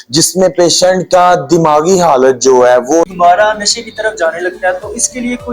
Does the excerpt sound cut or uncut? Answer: cut